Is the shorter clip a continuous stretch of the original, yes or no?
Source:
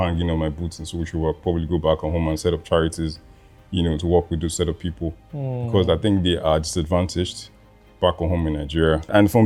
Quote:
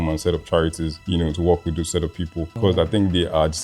no